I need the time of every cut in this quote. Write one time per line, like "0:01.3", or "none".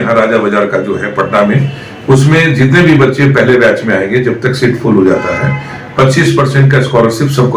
none

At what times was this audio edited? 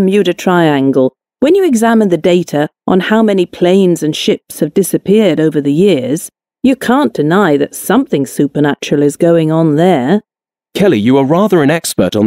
0:01.7
0:04.4
0:10.6

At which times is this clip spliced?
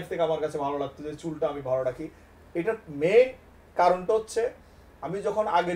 none

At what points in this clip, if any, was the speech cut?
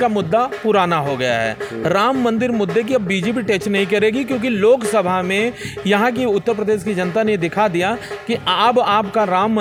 none

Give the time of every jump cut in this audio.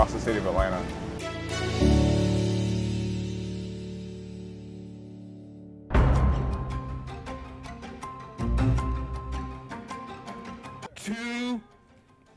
0:05.8

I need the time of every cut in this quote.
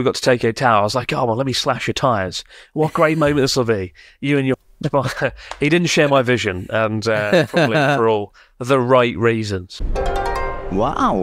0:09.7

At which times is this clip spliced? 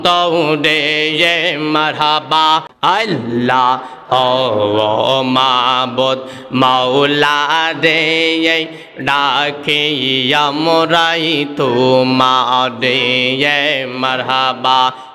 0:02.7

